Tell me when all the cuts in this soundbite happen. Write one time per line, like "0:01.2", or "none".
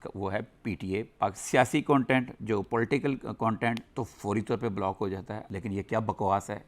0:01.4
0:05.3